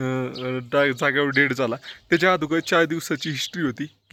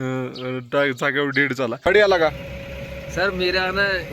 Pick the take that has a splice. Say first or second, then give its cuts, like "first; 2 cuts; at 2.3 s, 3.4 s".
second; 1 cut; at 1.9 s